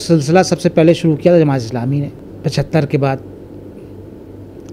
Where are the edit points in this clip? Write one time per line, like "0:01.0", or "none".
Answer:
0:02.2